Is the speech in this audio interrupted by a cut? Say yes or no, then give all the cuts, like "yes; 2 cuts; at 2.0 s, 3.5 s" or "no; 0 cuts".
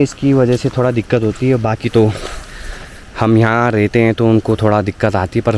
no; 0 cuts